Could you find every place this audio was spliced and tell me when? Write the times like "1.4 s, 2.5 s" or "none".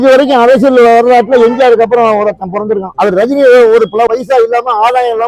2.9 s, 4.1 s

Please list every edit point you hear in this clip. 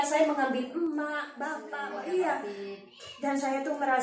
1.6 s

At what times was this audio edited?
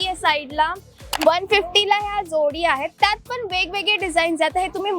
1.1 s

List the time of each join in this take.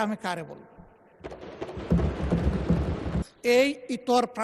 3.3 s

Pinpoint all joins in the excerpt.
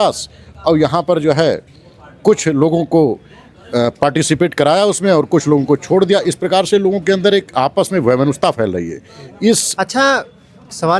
9.7 s

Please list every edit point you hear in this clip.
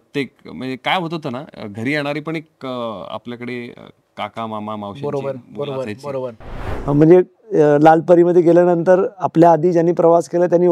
6.7 s

